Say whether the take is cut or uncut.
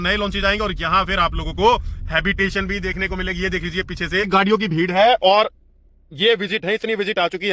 cut